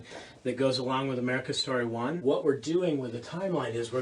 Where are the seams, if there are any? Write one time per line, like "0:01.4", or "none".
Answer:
0:02.2